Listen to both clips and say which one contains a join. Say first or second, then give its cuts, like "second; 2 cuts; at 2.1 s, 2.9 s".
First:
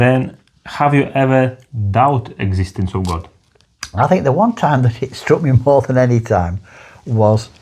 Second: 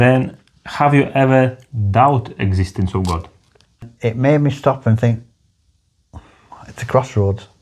second; 1 cut; at 3.9 s